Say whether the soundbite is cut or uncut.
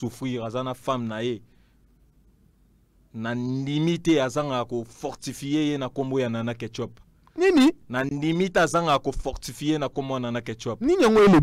uncut